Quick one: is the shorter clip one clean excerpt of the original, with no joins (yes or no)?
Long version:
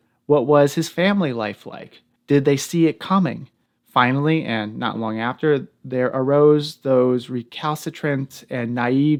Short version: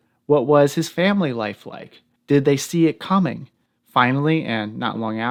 yes